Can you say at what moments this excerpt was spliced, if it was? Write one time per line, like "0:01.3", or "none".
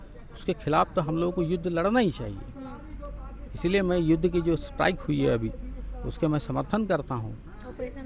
none